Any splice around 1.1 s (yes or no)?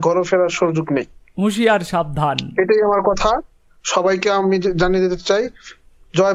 no